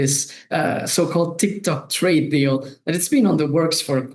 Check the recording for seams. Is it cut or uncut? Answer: uncut